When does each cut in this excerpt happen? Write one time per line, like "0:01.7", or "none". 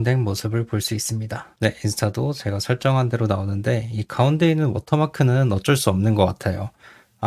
0:01.4